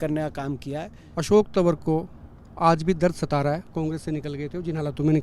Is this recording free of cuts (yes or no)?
no